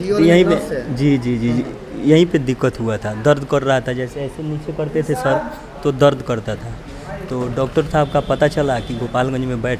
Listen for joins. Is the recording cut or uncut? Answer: uncut